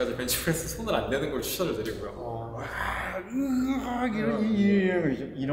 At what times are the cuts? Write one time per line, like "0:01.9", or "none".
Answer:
0:02.4